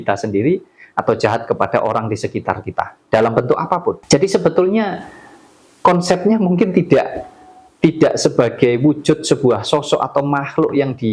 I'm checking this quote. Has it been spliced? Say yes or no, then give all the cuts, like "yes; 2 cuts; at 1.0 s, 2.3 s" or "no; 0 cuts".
yes; 1 cut; at 4.0 s